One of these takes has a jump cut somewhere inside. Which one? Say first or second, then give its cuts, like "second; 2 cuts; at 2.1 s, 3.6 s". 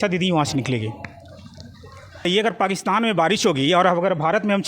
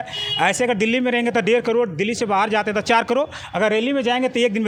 first; 1 cut; at 2.3 s